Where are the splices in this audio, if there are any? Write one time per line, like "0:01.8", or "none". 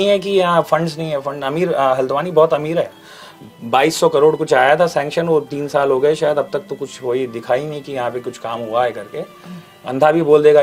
none